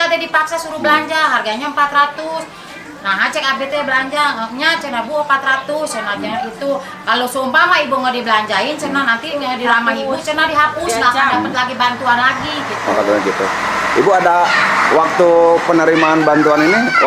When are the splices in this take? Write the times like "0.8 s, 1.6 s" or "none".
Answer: none

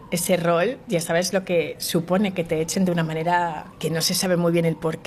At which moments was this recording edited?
3.7 s

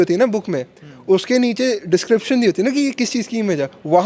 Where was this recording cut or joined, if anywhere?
none

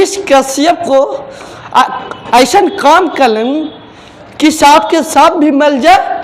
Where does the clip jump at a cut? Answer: none

